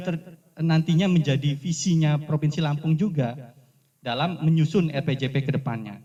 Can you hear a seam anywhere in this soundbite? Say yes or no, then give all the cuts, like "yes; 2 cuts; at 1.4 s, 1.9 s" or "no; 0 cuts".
no; 0 cuts